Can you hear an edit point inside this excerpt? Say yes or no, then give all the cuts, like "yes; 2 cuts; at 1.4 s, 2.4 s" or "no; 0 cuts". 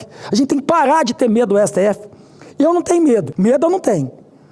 yes; 1 cut; at 3.3 s